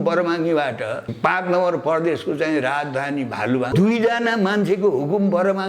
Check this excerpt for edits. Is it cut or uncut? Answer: cut